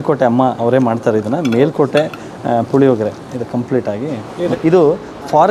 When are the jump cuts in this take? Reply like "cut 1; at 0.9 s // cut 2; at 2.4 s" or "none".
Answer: cut 1; at 4.5 s